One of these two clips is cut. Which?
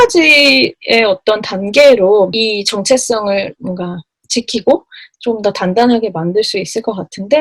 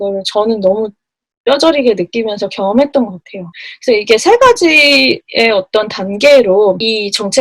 second; 1 cut; at 3.6 s

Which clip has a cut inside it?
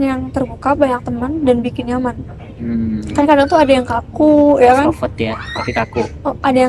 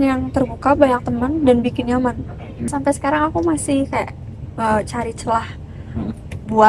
second; 1 cut; at 2.6 s

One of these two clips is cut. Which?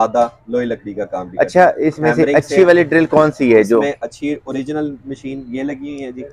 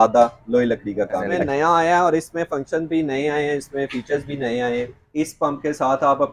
second; 2 cuts; at 1.3 s, 5.0 s

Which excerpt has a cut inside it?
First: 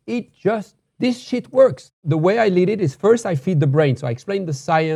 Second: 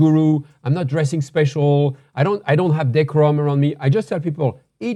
first; 1 cut; at 1.9 s

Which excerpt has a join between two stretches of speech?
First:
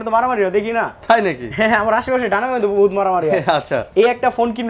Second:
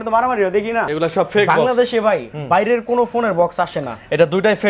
second; 1 cut; at 0.9 s

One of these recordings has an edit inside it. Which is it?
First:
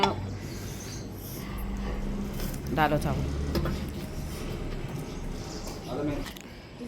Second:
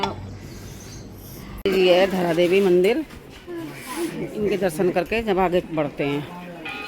second; 1 cut; at 1.6 s

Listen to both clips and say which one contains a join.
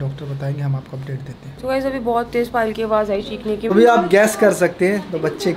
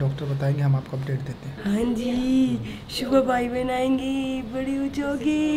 first; 2 cuts; at 1.6 s, 3.6 s

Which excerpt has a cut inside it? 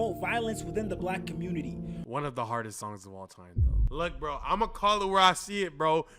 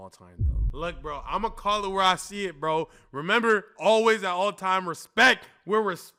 first; 1 cut; at 2.0 s

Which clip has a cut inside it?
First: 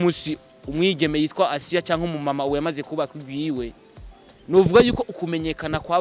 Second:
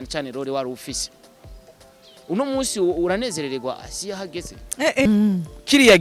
second; 1 cut; at 5.0 s

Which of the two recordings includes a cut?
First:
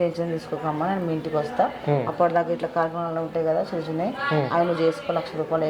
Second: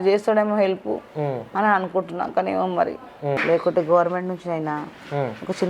second; 1 cut; at 3.4 s

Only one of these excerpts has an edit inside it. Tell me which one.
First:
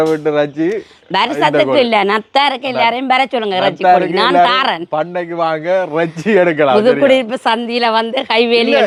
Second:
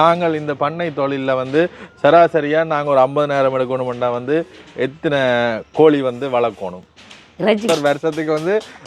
second; 1 cut; at 7.6 s

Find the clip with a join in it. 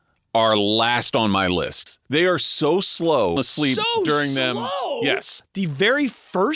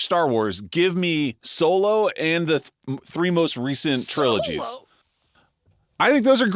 first; 3 cuts; at 2.0 s, 3.4 s, 5.4 s

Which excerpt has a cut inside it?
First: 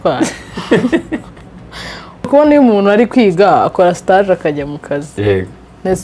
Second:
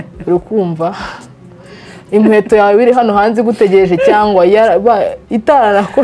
first; 1 cut; at 2.3 s

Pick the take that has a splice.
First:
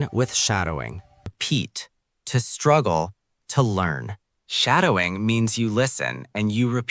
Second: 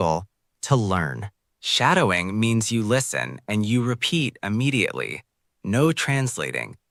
first; 1 cut; at 1.4 s

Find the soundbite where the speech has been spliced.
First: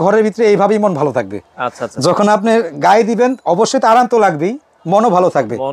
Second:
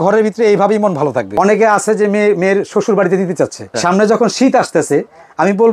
second; 2 cuts; at 1.3 s, 3.7 s

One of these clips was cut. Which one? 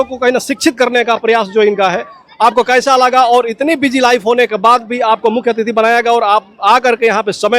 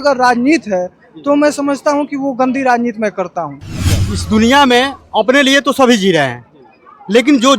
second; 1 cut; at 4.1 s

